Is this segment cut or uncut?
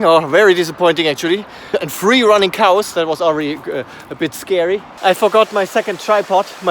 cut